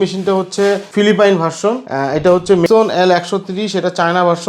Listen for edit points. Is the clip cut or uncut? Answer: cut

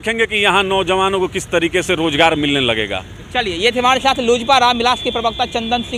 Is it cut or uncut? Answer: uncut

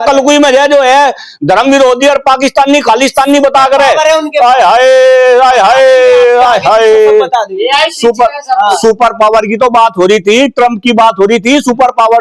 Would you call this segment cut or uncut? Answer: uncut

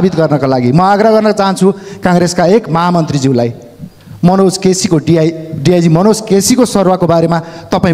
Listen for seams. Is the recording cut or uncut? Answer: uncut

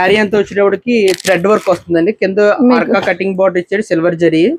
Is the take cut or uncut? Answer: uncut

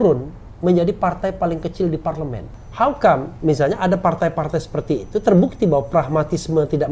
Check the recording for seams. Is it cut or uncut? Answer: cut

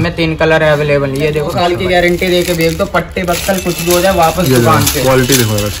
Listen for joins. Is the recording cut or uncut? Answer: cut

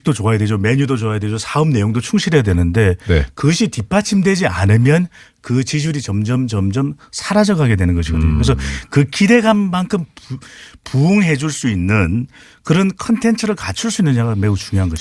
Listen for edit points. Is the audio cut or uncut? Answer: uncut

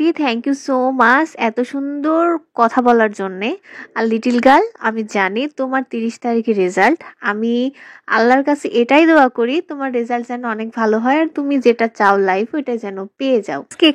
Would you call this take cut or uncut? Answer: uncut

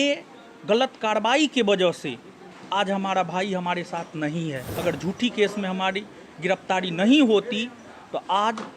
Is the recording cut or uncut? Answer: cut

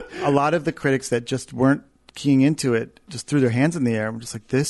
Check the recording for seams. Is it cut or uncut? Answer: uncut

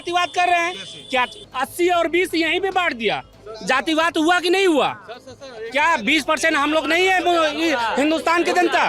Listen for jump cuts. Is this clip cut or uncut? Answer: cut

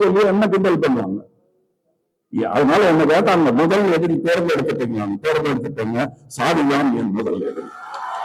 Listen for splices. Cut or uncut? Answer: uncut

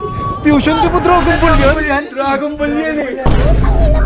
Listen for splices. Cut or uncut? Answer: uncut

